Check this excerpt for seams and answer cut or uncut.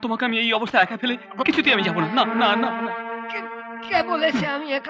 uncut